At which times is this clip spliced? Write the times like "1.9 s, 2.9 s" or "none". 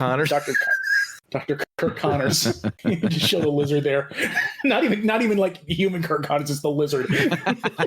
1.7 s, 2.7 s